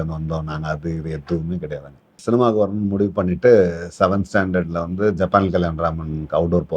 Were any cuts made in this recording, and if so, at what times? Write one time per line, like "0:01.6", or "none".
0:02.2